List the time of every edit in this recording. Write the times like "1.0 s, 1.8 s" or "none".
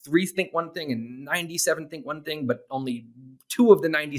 none